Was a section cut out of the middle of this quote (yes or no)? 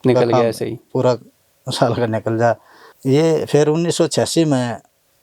yes